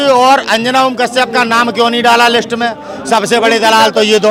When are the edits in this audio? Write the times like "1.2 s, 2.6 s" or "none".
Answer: none